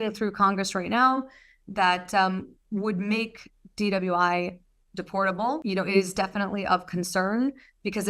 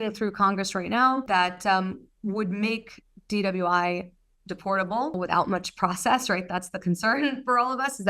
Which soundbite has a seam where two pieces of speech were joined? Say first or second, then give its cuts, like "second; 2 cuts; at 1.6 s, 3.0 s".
second; 2 cuts; at 1.2 s, 5.1 s